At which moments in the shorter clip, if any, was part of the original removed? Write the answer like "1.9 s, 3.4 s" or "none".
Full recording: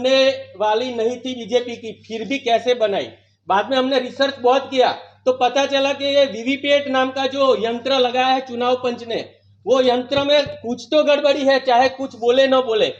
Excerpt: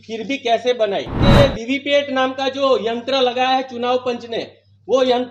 1.2 s